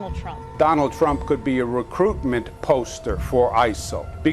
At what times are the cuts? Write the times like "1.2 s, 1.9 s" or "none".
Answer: 1.2 s